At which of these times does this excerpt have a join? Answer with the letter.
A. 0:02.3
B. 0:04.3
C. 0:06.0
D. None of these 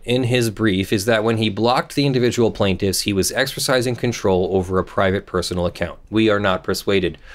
C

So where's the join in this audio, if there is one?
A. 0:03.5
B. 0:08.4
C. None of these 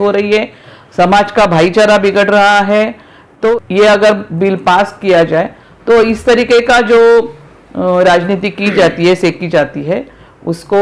A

